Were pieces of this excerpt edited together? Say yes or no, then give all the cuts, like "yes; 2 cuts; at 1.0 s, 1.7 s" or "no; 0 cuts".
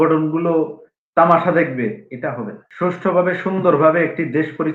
yes; 1 cut; at 2.6 s